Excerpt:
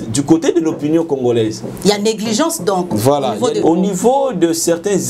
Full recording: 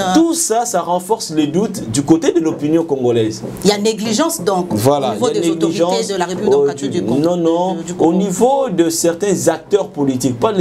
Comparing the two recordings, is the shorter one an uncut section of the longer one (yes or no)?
no